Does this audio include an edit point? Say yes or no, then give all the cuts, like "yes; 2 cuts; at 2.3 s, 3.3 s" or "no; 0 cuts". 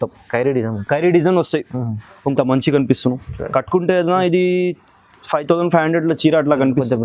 yes; 1 cut; at 2.1 s